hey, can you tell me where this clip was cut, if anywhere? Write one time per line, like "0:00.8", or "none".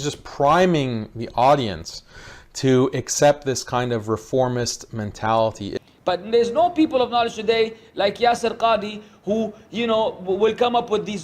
0:05.7